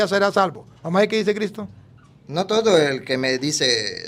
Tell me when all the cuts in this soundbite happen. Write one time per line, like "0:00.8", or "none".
none